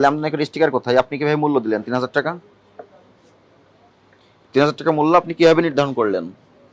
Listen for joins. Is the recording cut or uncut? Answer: uncut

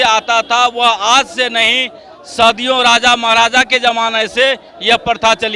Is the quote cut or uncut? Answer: uncut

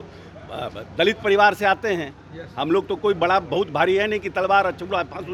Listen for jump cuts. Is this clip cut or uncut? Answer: uncut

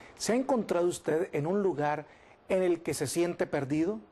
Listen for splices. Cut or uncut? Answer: cut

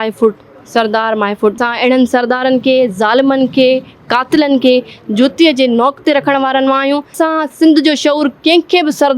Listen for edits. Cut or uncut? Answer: cut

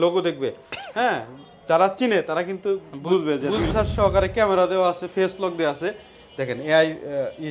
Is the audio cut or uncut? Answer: cut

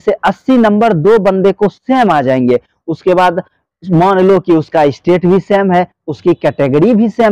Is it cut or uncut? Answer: uncut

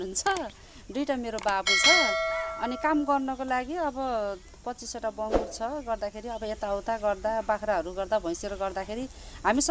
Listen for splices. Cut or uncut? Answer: uncut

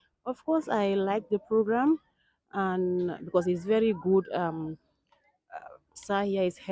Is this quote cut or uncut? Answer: uncut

